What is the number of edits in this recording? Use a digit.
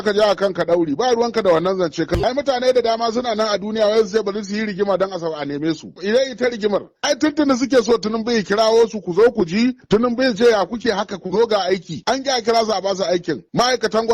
3